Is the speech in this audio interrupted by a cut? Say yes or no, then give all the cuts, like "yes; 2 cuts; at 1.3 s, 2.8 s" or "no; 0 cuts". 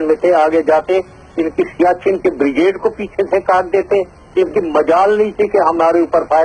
yes; 1 cut; at 4.7 s